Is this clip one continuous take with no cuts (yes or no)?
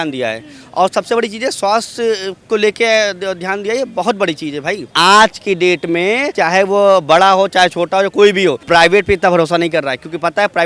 no